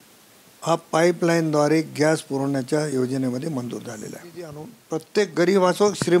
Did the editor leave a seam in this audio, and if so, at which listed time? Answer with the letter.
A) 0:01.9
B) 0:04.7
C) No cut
B